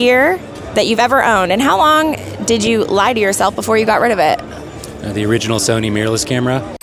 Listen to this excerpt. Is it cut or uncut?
uncut